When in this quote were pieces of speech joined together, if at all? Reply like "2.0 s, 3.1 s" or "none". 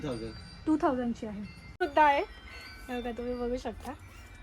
1.8 s